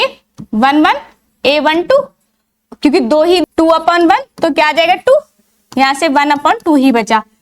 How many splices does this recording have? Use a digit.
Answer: 1